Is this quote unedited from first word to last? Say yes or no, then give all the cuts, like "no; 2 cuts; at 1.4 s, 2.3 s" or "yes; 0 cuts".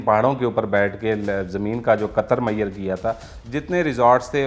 no; 1 cut; at 3.3 s